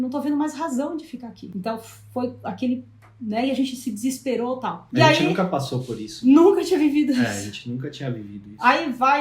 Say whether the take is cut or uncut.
cut